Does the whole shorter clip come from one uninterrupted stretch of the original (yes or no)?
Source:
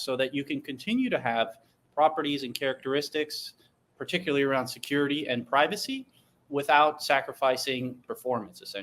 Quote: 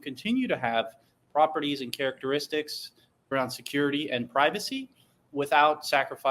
no